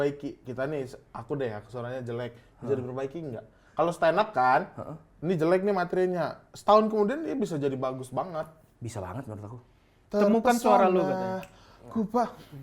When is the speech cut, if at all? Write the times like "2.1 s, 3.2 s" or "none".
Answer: 9.9 s